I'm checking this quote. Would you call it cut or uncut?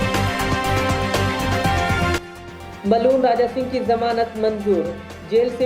uncut